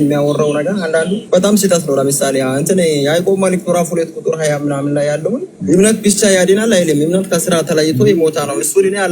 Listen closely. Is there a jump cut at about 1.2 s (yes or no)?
yes